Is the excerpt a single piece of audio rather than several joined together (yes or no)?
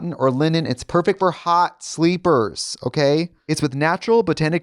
no